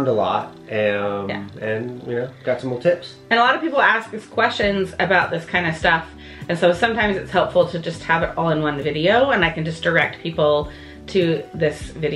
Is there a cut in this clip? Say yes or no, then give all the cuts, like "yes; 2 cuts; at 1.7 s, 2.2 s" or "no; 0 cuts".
no; 0 cuts